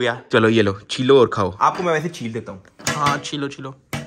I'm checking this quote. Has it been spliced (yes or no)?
no